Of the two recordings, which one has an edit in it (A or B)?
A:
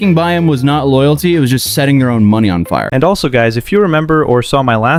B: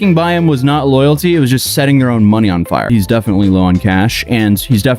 B